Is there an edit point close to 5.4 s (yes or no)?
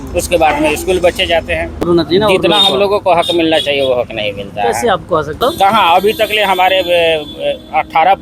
yes